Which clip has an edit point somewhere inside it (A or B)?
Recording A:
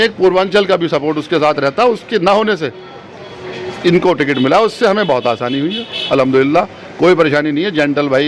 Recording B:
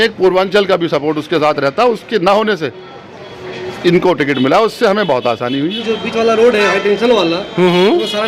B